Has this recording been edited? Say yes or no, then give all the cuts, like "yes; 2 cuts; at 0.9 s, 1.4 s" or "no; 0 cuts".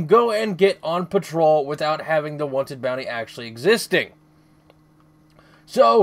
yes; 1 cut; at 1.7 s